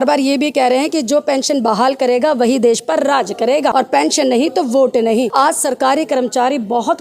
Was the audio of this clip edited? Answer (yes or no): yes